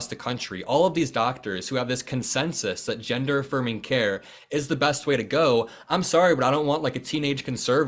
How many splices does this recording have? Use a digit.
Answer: 0